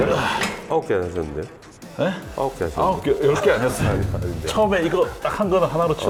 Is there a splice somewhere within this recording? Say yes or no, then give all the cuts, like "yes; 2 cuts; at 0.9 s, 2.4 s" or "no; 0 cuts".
no; 0 cuts